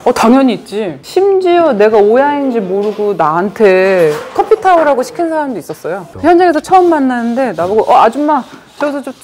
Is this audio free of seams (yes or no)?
yes